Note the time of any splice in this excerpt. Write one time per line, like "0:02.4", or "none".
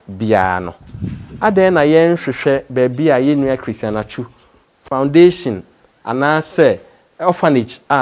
none